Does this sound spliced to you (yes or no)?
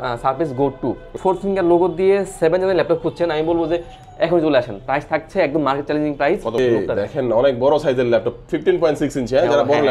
yes